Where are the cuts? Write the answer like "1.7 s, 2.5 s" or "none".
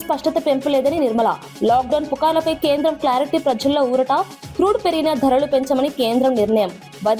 none